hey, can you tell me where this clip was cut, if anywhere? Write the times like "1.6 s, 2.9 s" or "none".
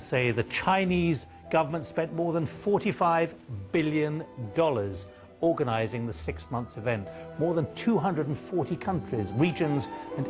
6.7 s